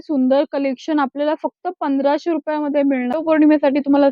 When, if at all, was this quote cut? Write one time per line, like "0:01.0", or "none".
0:03.1

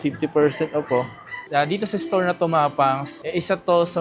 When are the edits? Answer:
0:01.3

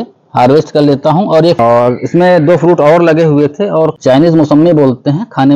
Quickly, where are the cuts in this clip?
0:01.6
0:03.9

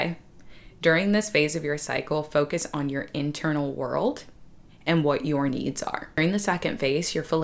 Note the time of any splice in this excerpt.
0:06.2

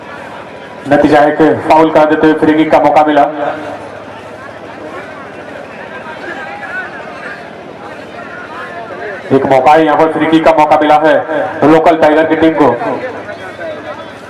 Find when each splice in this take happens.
none

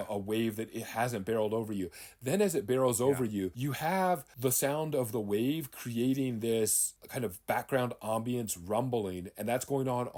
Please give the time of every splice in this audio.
none

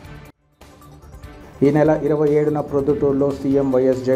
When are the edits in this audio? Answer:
none

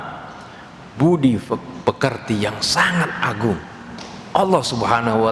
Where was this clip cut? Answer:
none

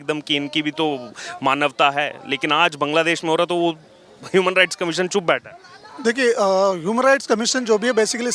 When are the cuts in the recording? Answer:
none

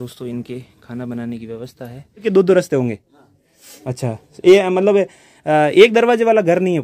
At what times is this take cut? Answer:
0:02.2

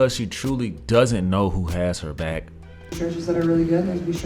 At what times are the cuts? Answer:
0:03.0

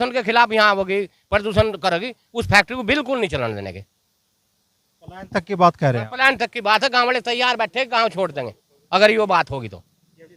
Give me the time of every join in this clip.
none

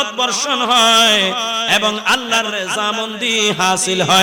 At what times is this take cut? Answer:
none

